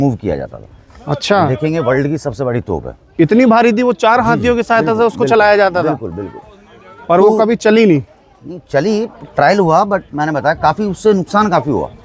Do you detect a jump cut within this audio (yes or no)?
no